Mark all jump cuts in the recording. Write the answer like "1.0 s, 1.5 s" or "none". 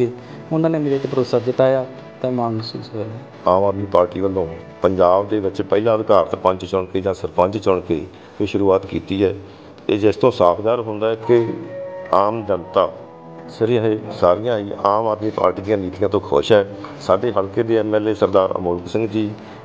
3.2 s